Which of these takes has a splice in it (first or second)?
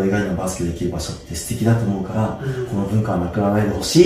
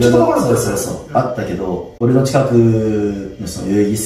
second